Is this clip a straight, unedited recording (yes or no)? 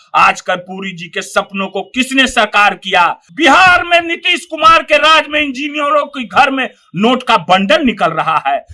no